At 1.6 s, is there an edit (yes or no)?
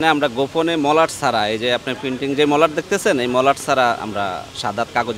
no